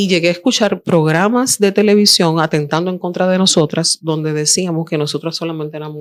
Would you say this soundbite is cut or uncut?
uncut